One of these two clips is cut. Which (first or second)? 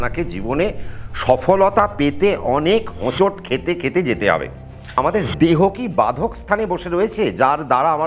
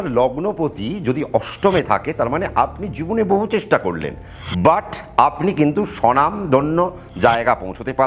first